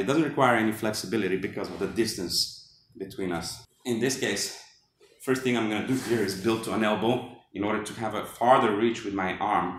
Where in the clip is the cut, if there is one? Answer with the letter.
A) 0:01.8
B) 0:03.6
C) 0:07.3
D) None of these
B